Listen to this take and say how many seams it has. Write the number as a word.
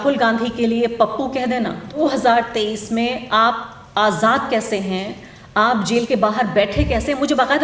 one